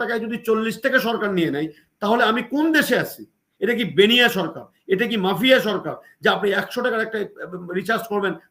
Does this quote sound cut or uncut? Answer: uncut